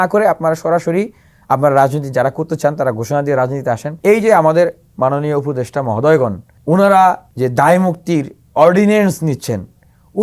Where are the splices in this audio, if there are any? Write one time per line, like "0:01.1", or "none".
0:03.9
0:06.5
0:07.3